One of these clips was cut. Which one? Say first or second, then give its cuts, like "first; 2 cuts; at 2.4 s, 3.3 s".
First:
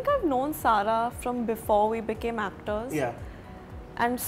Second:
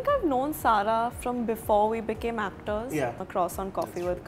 second; 1 cut; at 3.2 s